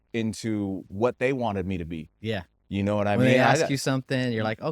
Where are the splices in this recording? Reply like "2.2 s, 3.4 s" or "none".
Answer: none